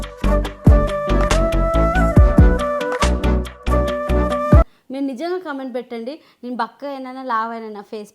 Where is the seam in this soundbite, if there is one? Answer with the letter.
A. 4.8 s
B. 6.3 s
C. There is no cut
A